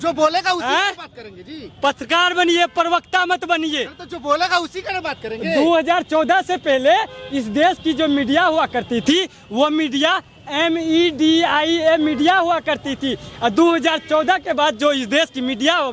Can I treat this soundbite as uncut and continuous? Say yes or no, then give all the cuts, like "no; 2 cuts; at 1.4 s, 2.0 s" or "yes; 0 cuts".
yes; 0 cuts